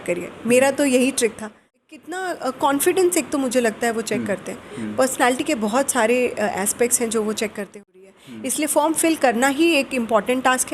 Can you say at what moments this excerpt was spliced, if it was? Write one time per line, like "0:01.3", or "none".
0:01.7
0:07.9